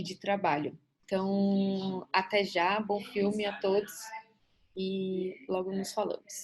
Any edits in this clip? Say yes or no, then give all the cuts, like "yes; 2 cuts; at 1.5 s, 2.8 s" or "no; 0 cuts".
yes; 1 cut; at 0.9 s